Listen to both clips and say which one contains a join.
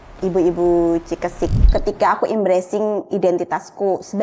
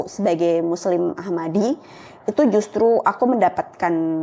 first; 1 cut; at 1.6 s

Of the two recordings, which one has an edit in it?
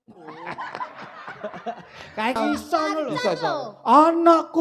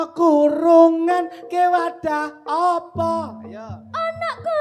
first; 1 cut; at 2.4 s

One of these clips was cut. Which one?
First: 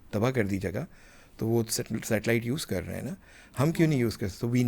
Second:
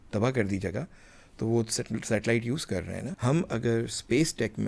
second; 1 cut; at 3.0 s

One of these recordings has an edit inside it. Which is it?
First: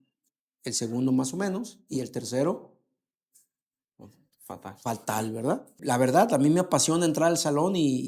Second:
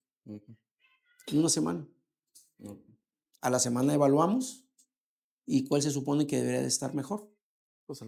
first; 1 cut; at 5.7 s

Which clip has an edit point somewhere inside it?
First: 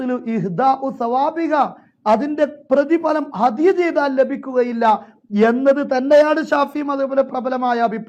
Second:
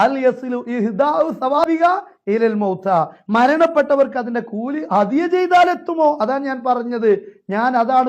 second; 1 cut; at 1.6 s

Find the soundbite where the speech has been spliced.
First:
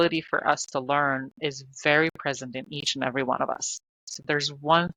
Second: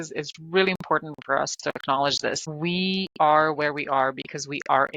second; 1 cut; at 2.5 s

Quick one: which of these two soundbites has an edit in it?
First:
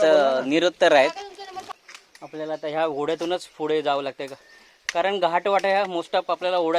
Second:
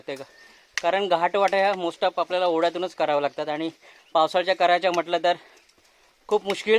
first; 1 cut; at 1.8 s

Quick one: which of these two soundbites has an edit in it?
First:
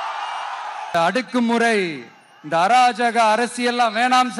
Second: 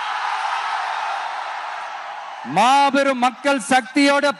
first; 1 cut; at 0.9 s

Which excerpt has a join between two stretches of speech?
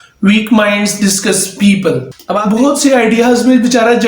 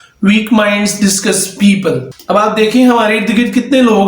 first; 1 cut; at 2.4 s

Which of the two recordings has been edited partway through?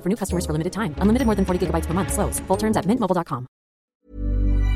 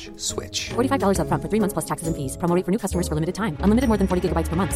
first; 1 cut; at 3.8 s

